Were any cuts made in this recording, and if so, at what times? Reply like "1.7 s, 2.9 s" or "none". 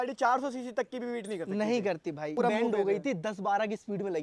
2.4 s